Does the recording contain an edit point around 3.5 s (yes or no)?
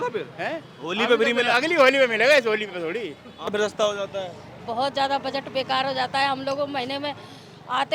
yes